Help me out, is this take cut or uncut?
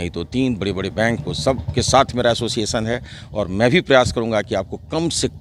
uncut